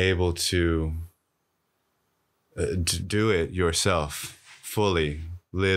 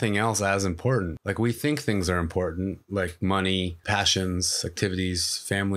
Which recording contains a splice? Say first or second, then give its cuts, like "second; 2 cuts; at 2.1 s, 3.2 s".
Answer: second; 2 cuts; at 1.2 s, 3.8 s